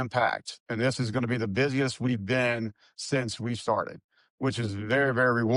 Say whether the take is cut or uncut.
uncut